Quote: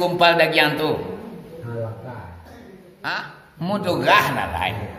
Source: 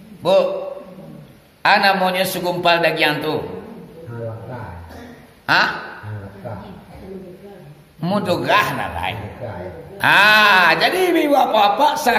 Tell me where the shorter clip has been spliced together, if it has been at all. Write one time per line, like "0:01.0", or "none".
0:03.4